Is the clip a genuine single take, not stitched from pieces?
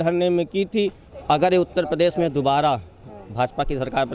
no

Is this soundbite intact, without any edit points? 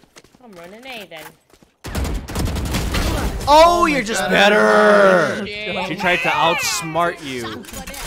yes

